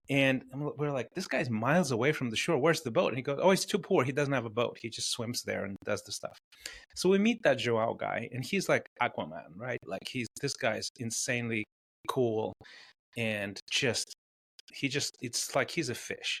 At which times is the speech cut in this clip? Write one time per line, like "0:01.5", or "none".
none